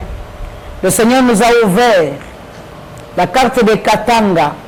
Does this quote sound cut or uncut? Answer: uncut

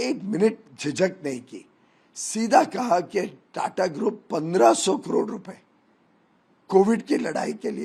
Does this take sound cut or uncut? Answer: uncut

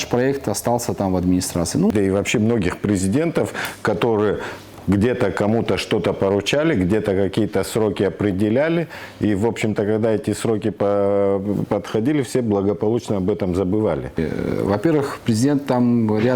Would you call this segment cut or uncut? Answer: cut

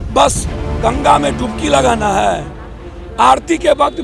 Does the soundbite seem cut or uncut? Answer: uncut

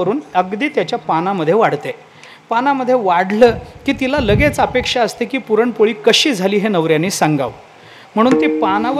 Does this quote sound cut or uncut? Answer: uncut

